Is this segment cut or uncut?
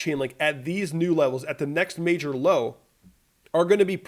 uncut